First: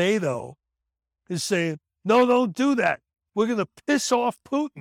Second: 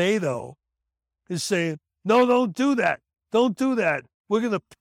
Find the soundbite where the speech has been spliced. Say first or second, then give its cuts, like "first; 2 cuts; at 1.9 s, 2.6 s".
first; 1 cut; at 3.1 s